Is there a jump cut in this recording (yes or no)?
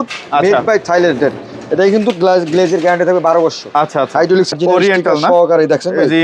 yes